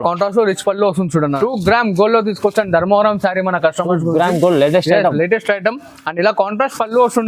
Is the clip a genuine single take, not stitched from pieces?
no; 1 cut; at 1.3 s

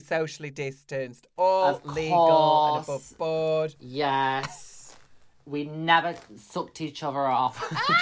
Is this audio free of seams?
yes; 0 cuts

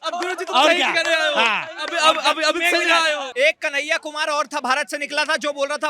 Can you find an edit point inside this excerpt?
yes; 1 cut; at 3.3 s

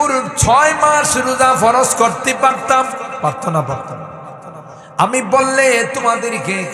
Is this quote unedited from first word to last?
yes; 0 cuts

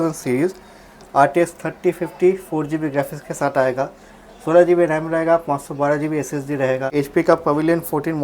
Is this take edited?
yes; 1 cut; at 6.9 s

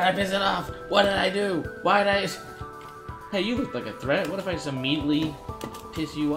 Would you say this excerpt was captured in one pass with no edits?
yes; 0 cuts

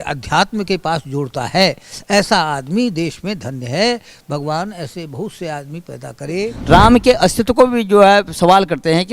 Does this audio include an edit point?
yes; 1 cut; at 6.5 s

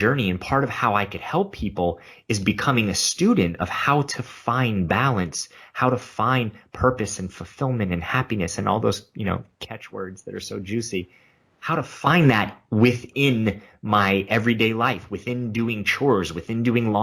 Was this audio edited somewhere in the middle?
no; 0 cuts

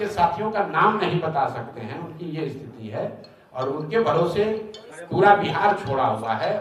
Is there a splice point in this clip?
no; 0 cuts

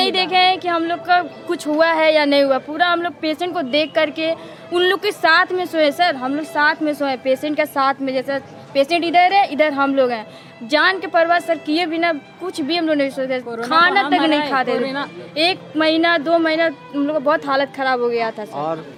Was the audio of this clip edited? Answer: no; 0 cuts

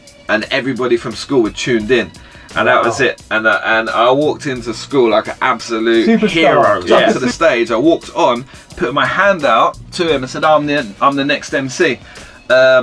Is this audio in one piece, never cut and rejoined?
no; 1 cut; at 7.3 s

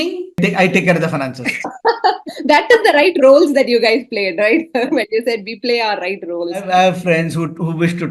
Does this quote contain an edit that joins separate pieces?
no; 0 cuts

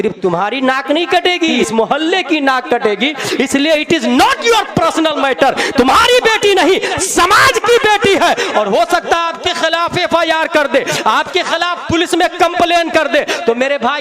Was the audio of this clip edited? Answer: yes; 1 cut; at 1.6 s

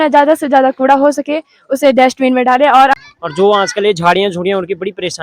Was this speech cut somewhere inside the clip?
yes; 1 cut; at 3.0 s

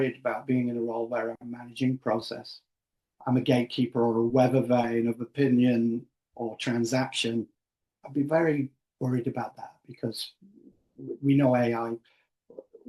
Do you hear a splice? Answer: no; 0 cuts

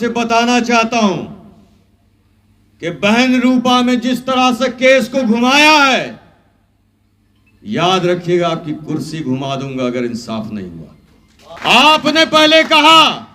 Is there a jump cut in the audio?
yes; 1 cut; at 11.6 s

